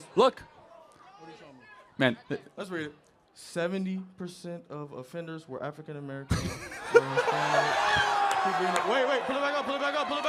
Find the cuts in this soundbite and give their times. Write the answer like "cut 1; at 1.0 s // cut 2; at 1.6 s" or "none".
none